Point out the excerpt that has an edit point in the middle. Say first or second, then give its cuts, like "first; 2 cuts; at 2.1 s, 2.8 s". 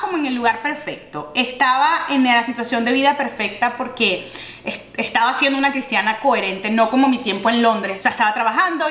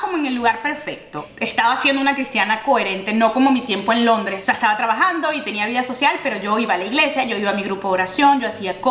second; 1 cut; at 1.3 s